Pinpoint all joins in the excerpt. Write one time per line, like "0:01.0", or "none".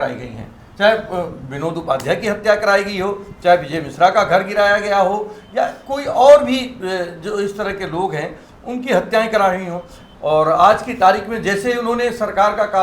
0:10.0